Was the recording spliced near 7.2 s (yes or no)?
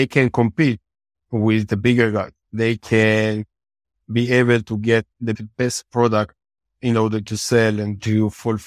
no